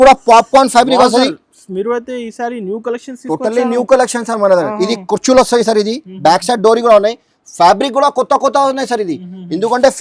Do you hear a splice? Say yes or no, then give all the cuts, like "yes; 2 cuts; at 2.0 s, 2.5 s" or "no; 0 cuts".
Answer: no; 0 cuts